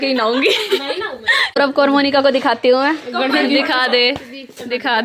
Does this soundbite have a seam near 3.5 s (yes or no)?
no